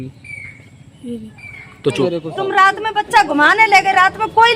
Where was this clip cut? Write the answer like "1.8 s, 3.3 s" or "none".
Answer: 2.1 s